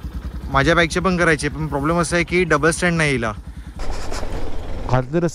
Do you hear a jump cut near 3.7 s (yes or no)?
yes